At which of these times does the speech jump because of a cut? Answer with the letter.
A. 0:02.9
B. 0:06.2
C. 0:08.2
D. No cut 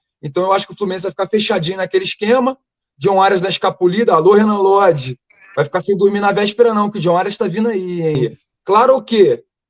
C